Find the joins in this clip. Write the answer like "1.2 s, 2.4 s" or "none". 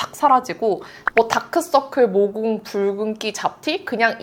1.0 s